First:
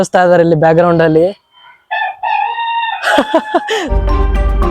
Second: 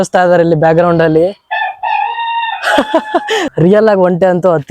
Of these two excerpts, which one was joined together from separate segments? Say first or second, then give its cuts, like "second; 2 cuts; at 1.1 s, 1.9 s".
second; 2 cuts; at 1.4 s, 3.5 s